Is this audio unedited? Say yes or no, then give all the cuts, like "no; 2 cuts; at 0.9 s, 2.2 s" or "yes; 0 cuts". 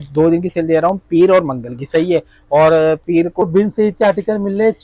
no; 1 cut; at 3.4 s